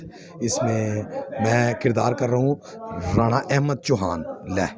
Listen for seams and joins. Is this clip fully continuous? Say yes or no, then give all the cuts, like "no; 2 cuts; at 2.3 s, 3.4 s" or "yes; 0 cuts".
yes; 0 cuts